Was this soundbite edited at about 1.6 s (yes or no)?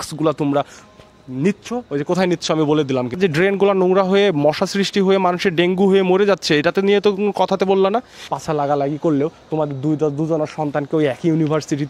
no